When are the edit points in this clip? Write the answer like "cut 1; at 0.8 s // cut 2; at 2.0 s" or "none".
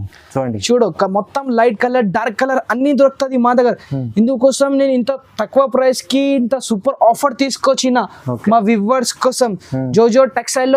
none